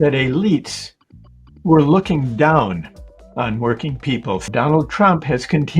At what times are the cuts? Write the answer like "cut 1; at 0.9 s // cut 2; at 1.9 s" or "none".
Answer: cut 1; at 4.5 s